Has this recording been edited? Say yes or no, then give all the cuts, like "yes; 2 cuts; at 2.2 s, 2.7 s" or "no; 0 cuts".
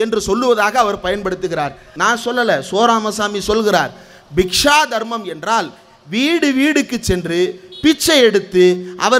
yes; 1 cut; at 1.9 s